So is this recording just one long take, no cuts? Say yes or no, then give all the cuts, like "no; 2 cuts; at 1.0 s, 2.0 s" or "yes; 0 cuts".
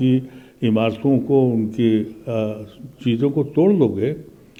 yes; 0 cuts